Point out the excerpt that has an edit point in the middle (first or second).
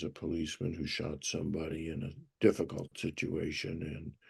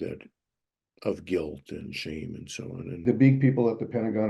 second